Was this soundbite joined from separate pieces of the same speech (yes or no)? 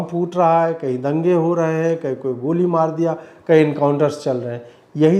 no